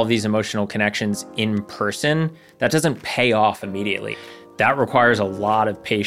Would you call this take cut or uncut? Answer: cut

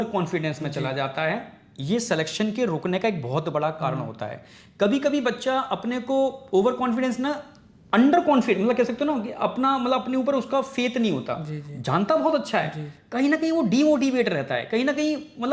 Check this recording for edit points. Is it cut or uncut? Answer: uncut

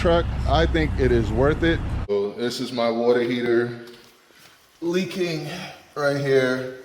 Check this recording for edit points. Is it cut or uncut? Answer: cut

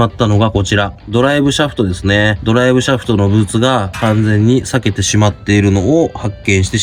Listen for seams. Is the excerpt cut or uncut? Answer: uncut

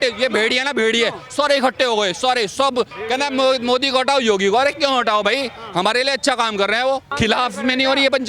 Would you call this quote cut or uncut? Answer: cut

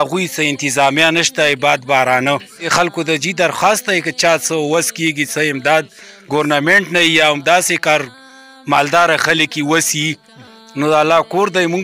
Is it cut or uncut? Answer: cut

